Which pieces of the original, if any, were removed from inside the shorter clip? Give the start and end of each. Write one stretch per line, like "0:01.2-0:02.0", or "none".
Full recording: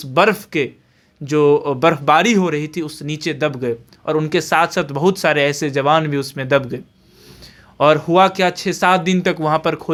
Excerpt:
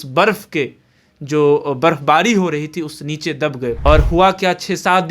0:03.8-0:07.8